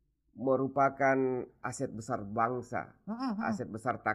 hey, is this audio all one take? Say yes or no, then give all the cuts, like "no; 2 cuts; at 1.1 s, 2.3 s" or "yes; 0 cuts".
yes; 0 cuts